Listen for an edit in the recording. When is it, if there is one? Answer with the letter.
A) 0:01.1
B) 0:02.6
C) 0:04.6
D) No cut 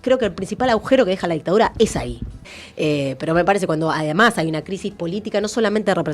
B